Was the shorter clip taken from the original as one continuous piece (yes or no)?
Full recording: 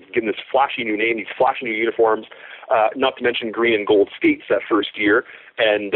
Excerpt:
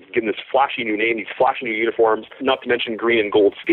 no